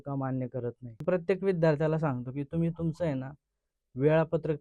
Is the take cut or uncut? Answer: cut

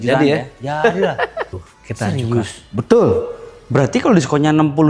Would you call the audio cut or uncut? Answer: cut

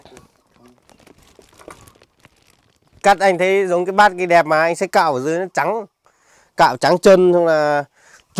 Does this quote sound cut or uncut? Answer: uncut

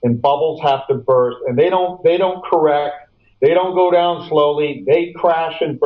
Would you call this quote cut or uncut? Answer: uncut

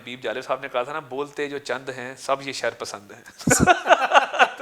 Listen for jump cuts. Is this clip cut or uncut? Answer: uncut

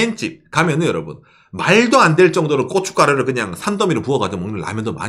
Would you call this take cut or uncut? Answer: uncut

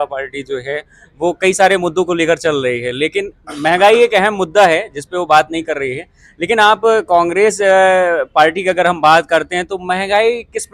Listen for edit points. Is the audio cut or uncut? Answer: uncut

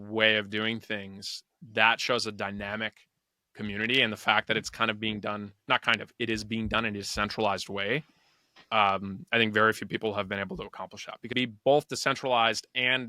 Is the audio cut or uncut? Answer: cut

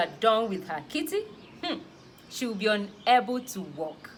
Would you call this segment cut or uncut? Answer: uncut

